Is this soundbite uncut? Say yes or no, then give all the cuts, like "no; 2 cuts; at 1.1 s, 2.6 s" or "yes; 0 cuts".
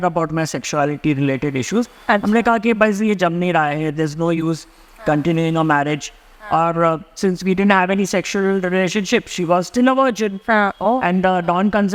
yes; 0 cuts